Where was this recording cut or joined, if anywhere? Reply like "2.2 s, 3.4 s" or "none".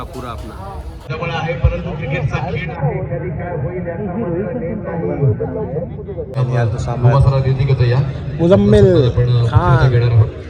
1.0 s, 6.4 s

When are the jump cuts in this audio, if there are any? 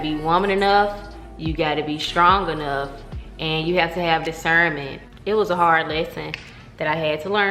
5.1 s

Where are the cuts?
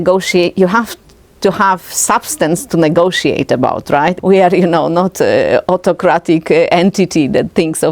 4.2 s

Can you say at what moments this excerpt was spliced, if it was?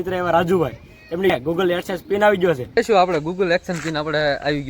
1.3 s, 2.8 s

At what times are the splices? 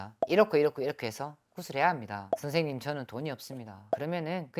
2.2 s

